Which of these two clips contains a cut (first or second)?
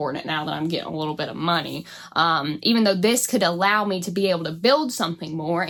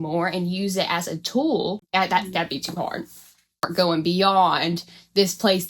second